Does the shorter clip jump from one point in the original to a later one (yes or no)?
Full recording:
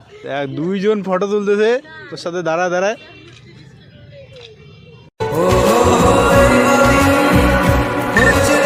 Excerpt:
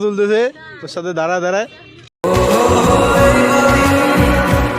yes